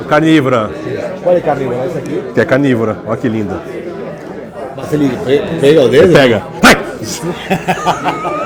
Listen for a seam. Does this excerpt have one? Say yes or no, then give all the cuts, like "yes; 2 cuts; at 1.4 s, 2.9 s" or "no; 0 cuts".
no; 0 cuts